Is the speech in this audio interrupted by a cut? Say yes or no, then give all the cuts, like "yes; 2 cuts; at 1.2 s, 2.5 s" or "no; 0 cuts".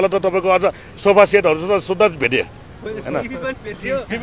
no; 0 cuts